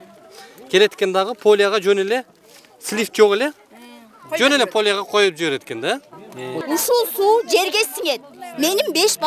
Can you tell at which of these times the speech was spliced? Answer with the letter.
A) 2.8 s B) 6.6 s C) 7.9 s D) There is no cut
B